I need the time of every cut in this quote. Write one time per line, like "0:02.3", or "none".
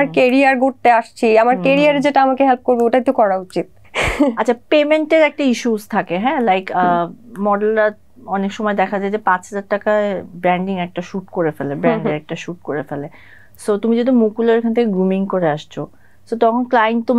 none